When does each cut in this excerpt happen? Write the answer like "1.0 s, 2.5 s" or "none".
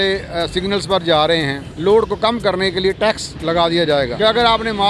1.6 s